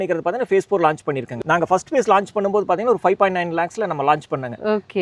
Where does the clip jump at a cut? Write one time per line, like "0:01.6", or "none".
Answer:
0:01.3